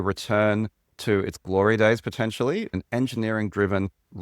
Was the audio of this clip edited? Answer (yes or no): yes